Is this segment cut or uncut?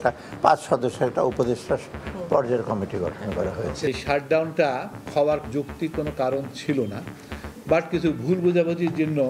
cut